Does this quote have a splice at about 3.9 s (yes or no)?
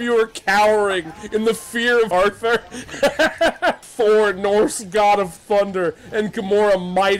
yes